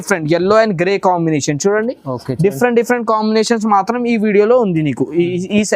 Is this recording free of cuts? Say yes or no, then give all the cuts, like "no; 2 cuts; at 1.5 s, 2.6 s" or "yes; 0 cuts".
yes; 0 cuts